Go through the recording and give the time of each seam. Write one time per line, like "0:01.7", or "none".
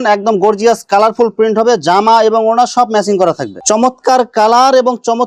0:03.5